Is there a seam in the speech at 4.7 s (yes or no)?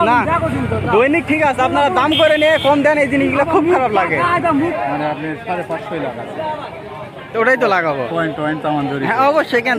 yes